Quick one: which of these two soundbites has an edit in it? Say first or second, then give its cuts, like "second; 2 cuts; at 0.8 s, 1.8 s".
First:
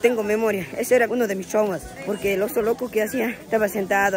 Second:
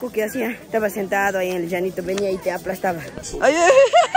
second; 1 cut; at 3.1 s